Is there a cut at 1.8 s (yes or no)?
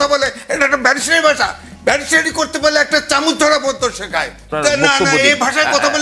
no